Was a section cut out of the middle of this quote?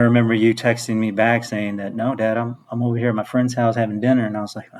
no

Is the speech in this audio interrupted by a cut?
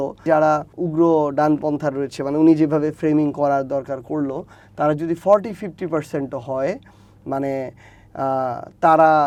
no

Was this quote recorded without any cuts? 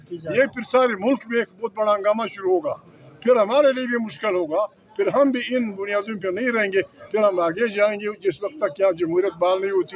yes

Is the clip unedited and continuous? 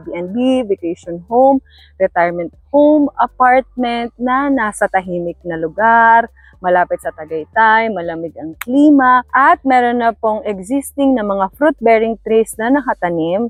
yes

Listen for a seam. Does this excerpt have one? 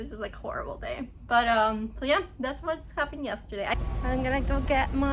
yes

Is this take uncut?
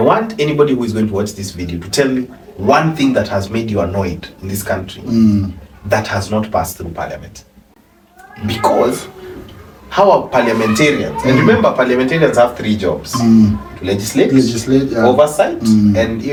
yes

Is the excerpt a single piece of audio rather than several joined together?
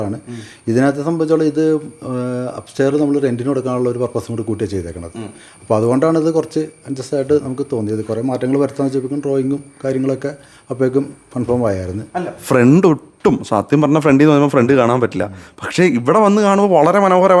yes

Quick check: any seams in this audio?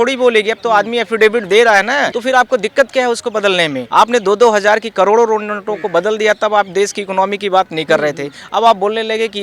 yes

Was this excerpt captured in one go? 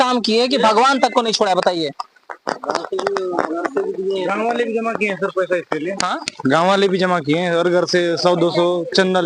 yes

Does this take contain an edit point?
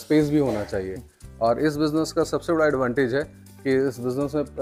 no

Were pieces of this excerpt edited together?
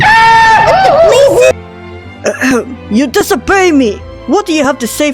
yes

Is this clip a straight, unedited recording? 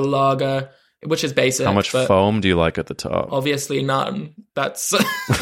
yes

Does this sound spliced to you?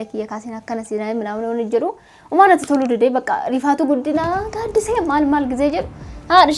no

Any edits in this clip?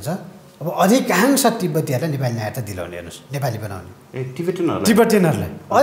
no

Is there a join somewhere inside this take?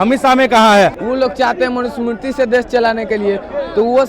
yes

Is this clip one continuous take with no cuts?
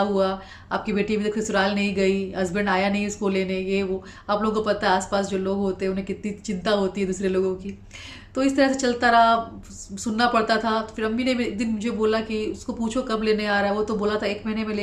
yes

